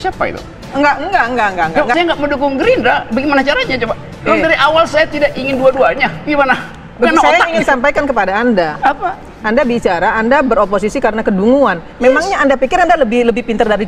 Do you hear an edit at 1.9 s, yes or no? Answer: yes